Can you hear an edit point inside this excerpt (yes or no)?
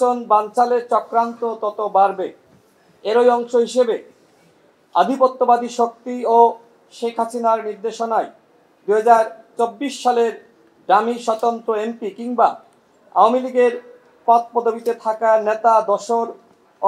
no